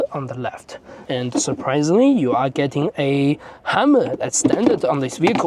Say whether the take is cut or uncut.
cut